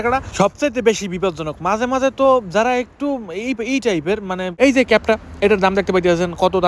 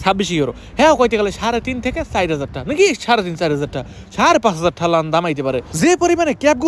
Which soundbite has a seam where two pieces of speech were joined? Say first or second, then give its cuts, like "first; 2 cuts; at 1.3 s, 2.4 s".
first; 1 cut; at 4.5 s